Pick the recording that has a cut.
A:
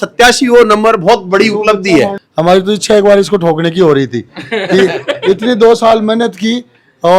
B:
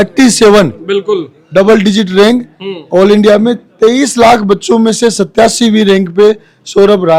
A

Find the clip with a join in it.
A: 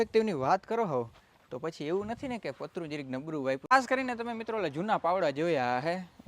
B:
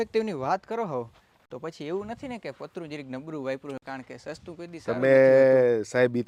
A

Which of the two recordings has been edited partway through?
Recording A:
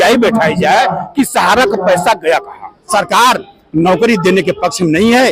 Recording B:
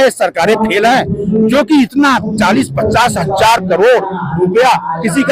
A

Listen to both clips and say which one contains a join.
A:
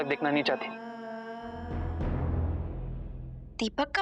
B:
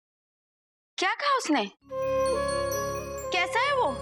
A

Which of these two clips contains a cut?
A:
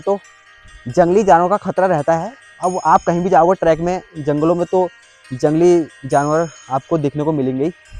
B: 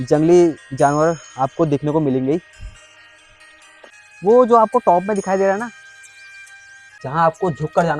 B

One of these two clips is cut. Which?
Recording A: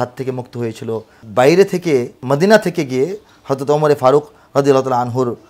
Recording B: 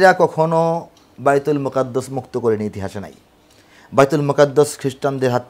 A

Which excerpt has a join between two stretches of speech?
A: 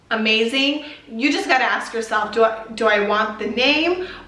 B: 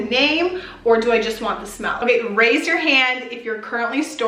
B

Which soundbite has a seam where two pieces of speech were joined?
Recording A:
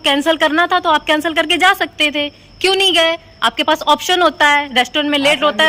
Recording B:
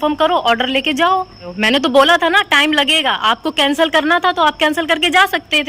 B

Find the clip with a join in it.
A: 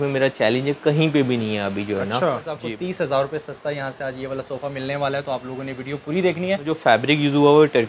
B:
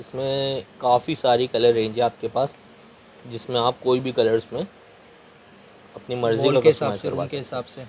A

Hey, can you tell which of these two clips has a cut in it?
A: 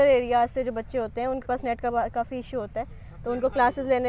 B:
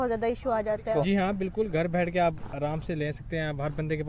B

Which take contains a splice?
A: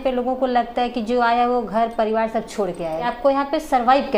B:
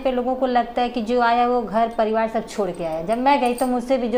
A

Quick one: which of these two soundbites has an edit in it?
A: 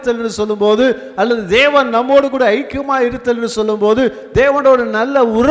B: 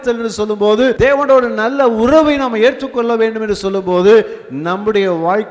B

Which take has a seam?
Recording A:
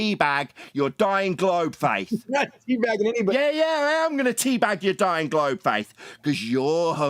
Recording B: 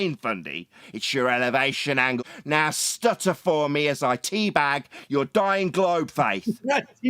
B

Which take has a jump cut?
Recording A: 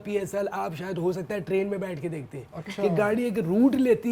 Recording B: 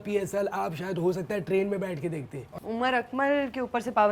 B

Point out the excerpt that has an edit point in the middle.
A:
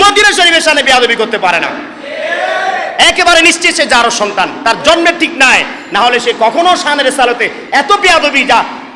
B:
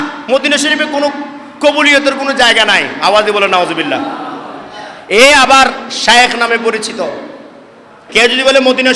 B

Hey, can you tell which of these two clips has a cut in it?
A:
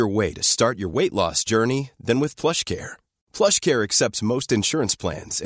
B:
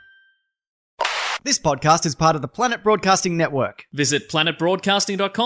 B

